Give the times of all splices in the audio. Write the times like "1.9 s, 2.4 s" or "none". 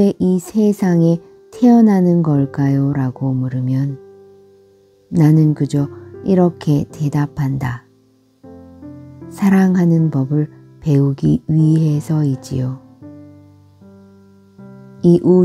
8.0 s, 9.4 s